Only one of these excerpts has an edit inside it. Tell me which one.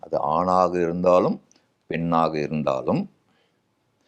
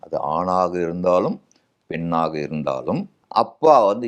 second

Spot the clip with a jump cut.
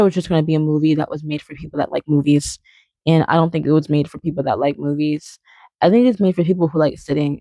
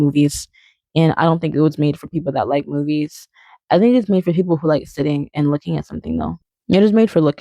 second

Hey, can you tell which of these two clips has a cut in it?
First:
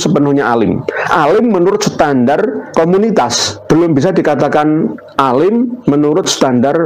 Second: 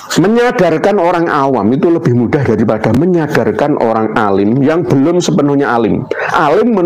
first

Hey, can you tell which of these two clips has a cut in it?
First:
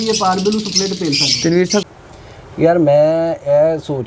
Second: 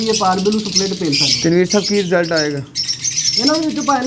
first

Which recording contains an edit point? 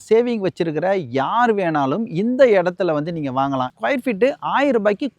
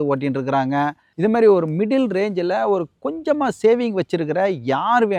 first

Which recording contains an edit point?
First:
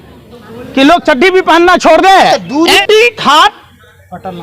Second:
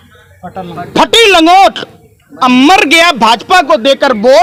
first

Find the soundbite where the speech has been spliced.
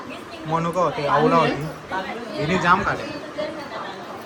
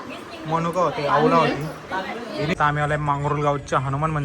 second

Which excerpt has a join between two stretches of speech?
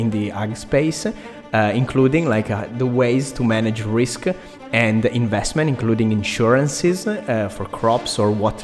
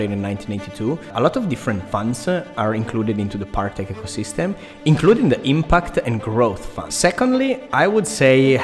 second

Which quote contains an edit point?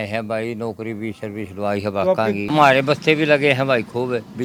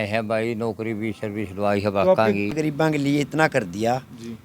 second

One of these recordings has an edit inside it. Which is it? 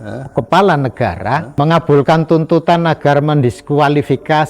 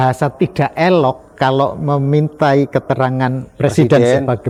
first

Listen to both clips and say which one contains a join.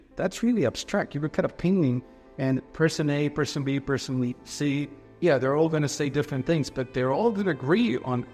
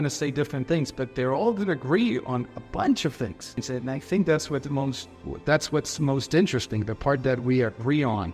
second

